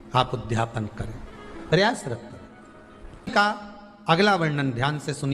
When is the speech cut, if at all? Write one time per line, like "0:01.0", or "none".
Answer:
0:03.3